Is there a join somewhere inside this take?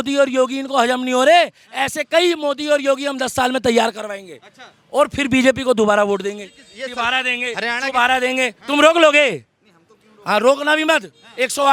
no; 0 cuts

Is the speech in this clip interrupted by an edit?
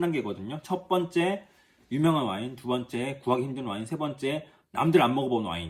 no; 0 cuts

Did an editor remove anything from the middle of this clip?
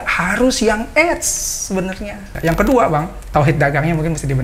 yes; 2 cuts; at 2.3 s, 3.2 s

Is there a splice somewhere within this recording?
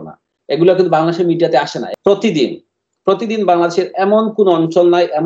yes; 1 cut; at 1.8 s

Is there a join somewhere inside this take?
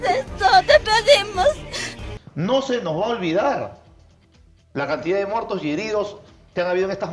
yes; 1 cut; at 2.2 s

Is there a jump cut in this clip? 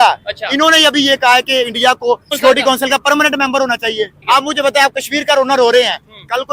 yes; 2 cuts; at 2.4 s, 4.2 s

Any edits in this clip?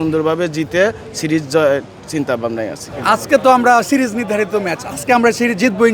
yes; 2 cuts; at 2.9 s, 4.8 s

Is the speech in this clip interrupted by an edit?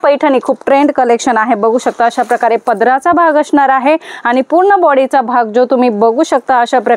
no; 0 cuts

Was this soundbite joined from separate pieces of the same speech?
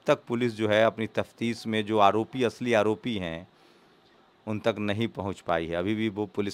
no; 0 cuts

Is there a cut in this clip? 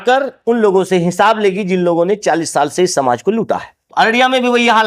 yes; 1 cut; at 3.8 s

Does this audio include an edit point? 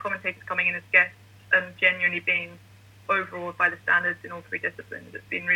no; 0 cuts

